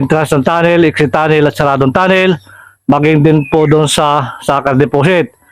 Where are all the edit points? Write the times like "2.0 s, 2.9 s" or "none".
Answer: none